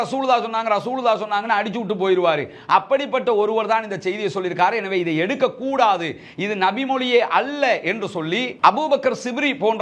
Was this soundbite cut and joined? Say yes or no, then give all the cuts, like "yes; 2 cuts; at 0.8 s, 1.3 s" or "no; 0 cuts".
no; 0 cuts